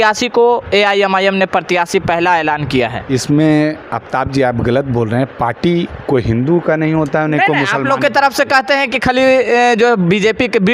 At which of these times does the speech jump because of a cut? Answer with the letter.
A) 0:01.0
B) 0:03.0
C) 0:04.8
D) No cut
B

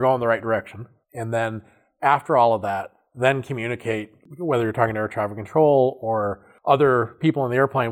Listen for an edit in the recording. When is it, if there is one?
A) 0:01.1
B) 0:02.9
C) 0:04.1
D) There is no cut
D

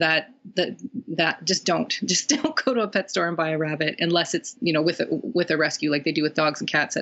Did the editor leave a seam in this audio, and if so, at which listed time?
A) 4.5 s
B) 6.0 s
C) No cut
A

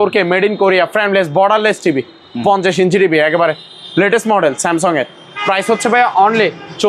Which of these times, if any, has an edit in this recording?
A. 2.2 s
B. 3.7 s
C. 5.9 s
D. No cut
D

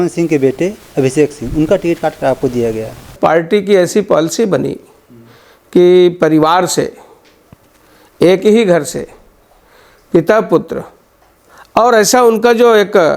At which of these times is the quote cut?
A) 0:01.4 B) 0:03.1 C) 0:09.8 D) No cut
B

